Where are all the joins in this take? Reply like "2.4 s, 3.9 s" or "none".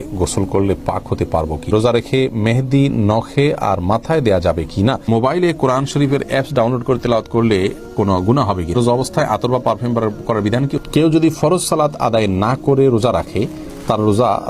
1.7 s, 5.1 s, 8.7 s, 10.8 s